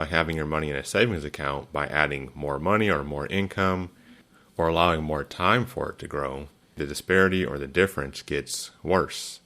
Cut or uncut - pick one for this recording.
cut